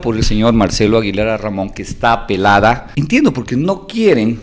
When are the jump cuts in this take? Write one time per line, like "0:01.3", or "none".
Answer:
0:02.9